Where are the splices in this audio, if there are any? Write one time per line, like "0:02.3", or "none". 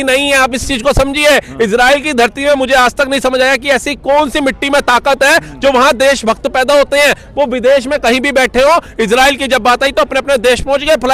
none